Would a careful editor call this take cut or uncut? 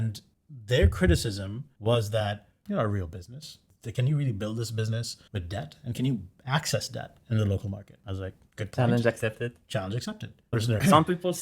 cut